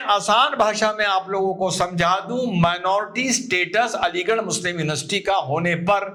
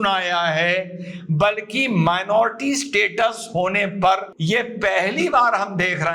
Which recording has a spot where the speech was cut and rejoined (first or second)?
second